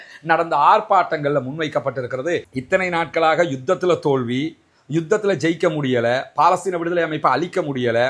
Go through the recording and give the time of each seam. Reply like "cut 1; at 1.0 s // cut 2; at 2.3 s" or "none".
cut 1; at 2.5 s